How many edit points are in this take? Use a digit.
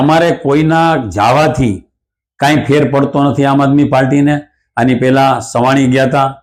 0